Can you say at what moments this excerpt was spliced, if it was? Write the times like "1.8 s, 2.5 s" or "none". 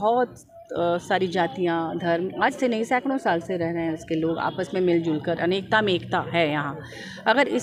none